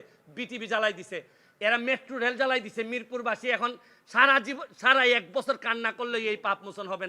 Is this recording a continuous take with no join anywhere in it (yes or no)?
yes